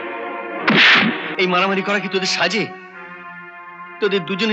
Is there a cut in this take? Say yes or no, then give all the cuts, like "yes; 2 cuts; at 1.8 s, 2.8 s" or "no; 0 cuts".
yes; 1 cut; at 1.3 s